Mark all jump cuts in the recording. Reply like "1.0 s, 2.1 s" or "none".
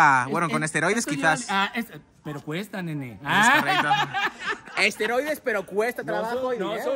none